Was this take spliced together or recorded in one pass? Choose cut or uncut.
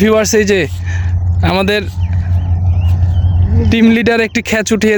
uncut